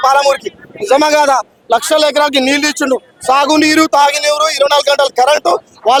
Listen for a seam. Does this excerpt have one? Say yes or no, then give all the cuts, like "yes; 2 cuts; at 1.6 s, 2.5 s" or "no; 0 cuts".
no; 0 cuts